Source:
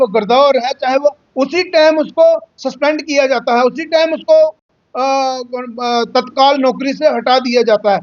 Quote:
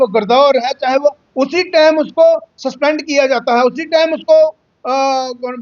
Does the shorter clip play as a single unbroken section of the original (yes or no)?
no